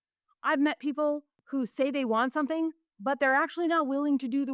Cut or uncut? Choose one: uncut